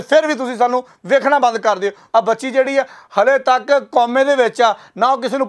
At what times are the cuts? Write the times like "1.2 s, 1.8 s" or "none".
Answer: 2.0 s